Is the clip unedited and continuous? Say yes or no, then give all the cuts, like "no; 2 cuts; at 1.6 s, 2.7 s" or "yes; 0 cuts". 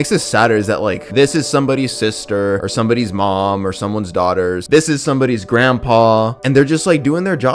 no; 1 cut; at 4.7 s